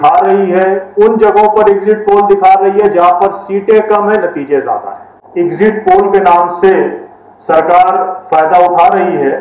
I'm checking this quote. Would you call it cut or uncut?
cut